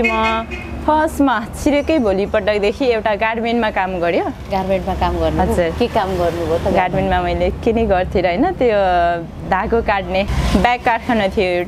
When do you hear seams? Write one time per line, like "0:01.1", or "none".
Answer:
none